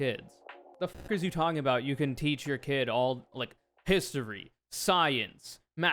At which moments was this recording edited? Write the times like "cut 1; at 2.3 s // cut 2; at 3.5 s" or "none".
cut 1; at 1.1 s